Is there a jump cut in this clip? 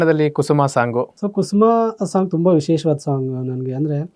yes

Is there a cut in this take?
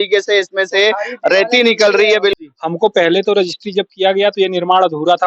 yes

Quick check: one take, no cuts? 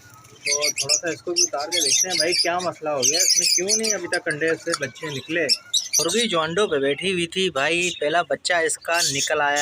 no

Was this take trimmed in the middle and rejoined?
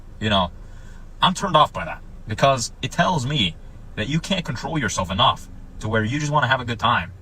yes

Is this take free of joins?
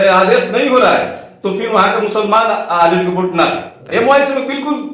no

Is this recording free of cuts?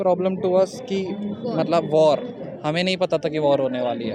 yes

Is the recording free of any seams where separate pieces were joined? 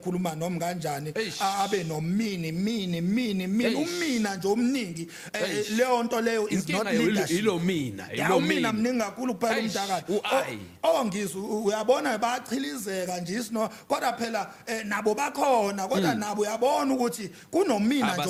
yes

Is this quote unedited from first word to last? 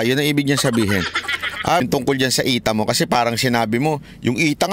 no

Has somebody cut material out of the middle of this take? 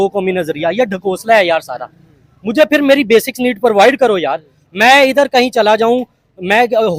no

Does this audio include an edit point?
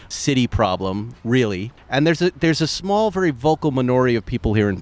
yes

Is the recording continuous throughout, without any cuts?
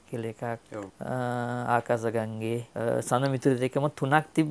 no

